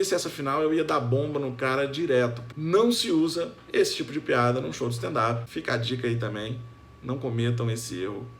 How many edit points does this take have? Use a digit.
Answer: 2